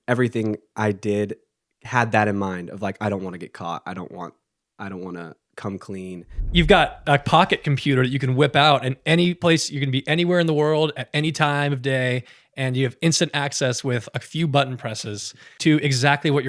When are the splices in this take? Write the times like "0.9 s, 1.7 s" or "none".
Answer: 6.4 s, 15.5 s